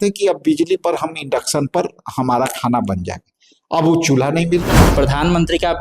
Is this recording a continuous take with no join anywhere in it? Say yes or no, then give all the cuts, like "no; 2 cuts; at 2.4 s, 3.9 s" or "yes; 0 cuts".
no; 1 cut; at 4.9 s